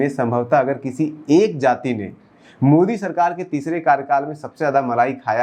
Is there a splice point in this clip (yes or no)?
no